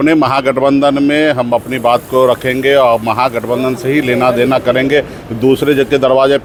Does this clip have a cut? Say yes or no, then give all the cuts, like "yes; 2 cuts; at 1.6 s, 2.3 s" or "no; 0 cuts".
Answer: no; 0 cuts